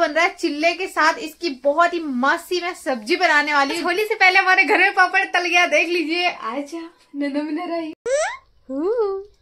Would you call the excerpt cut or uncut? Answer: cut